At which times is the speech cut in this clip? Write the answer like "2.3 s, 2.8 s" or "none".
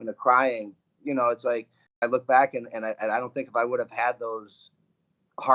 2.0 s

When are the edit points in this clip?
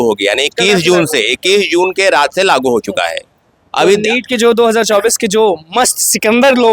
none

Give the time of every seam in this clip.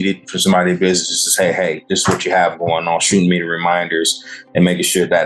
none

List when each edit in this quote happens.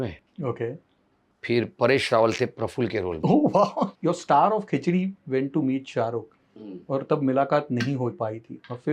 3.9 s

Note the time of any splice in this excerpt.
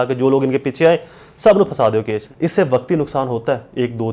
2.2 s

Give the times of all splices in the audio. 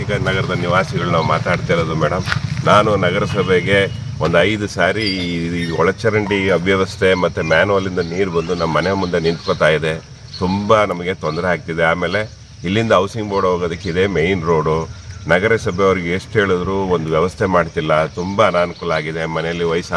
none

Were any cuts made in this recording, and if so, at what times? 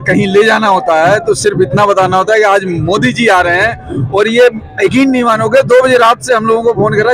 none

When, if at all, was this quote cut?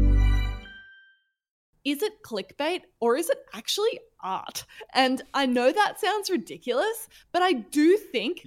1.6 s

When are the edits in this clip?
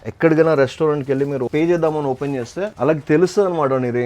1.5 s, 2.7 s

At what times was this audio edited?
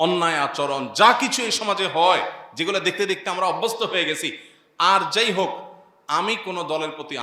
none

